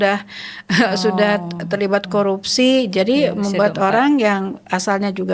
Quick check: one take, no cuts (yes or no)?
yes